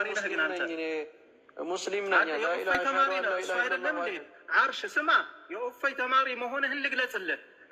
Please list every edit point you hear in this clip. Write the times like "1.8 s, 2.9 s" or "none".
none